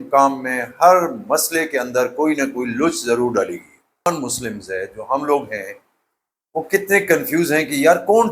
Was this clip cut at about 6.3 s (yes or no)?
no